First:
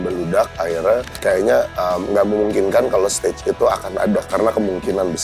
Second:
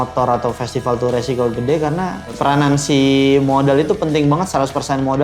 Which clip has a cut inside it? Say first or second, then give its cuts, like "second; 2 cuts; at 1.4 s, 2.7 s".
first; 2 cuts; at 1.1 s, 4.2 s